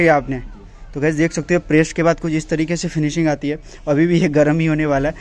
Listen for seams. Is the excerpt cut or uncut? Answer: uncut